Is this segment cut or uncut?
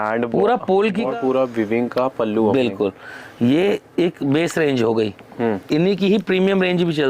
cut